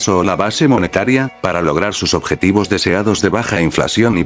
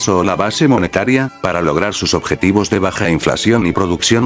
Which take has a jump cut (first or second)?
second